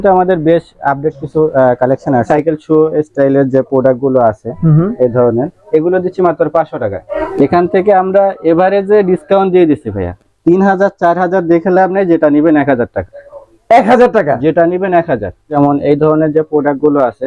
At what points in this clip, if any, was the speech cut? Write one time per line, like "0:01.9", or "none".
0:02.3
0:07.1
0:15.5